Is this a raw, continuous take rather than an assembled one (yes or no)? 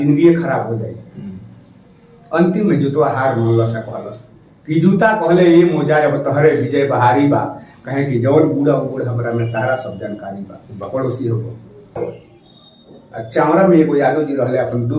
no